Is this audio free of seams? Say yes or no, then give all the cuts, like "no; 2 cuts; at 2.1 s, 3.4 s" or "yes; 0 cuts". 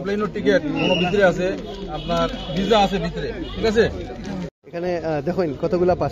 no; 1 cut; at 4.5 s